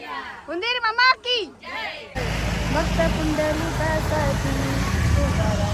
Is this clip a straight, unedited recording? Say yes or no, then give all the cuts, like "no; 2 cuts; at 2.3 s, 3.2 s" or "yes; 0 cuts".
no; 1 cut; at 2.3 s